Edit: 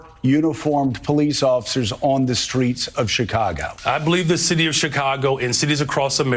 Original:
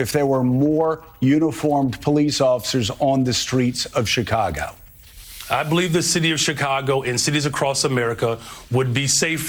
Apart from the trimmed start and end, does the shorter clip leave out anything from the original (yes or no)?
yes